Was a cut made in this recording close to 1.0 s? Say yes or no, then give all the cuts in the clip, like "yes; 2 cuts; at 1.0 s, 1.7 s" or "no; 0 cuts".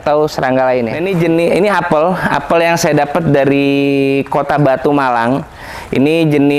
yes; 1 cut; at 1.0 s